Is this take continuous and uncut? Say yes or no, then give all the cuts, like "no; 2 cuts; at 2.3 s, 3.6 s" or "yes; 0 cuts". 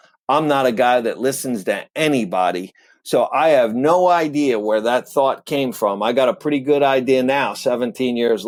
yes; 0 cuts